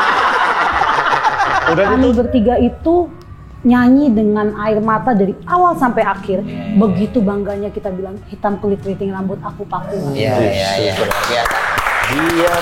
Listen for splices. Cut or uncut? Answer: cut